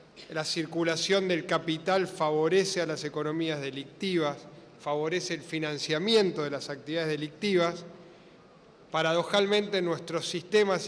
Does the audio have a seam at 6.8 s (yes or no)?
yes